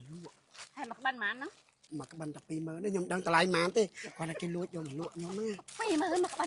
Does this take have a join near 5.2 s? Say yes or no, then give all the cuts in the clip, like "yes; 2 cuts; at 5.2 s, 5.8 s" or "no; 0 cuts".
no; 1 cut; at 1.7 s